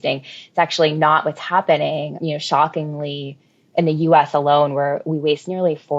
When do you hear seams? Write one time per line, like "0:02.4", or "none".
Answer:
0:02.1